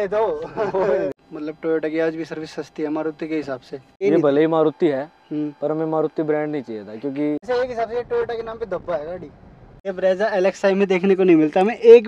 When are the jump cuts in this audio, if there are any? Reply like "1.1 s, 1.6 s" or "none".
1.1 s, 4.0 s, 7.4 s, 9.8 s